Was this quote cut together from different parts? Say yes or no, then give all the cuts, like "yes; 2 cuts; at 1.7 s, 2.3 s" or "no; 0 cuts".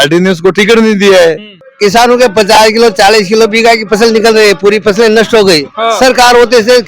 yes; 1 cut; at 1.5 s